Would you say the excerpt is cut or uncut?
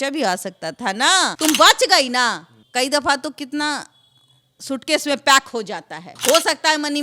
cut